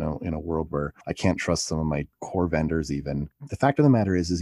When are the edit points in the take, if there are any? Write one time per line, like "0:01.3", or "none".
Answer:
0:02.2
0:03.3

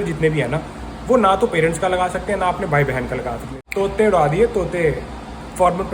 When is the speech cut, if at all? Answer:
0:03.6

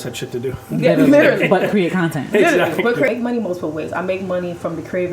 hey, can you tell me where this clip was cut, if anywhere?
0:03.1

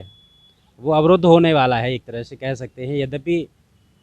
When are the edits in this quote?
none

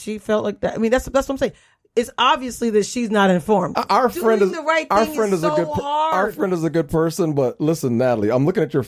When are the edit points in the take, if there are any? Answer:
0:03.8

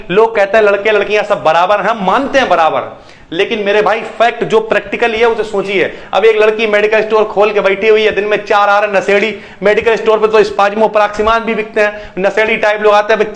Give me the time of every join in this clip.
none

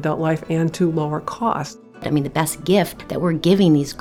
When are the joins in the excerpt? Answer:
0:02.0
0:03.0

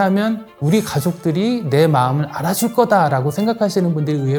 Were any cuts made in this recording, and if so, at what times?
none

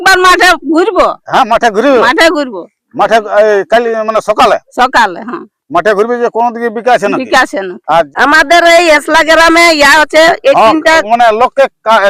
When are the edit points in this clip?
0:08.1

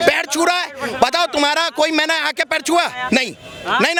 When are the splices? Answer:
none

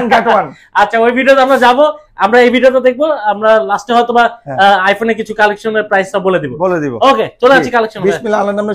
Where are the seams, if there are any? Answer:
none

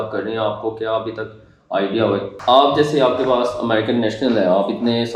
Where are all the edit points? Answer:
0:02.3

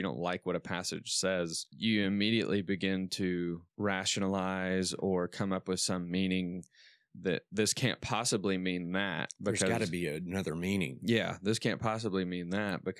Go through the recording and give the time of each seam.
0:01.6
0:03.7

